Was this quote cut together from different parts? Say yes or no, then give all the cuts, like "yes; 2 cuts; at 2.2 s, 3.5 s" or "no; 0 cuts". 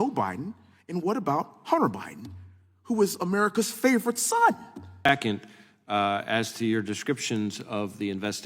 yes; 1 cut; at 5.1 s